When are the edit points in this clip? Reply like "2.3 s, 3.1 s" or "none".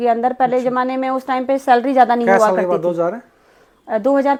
none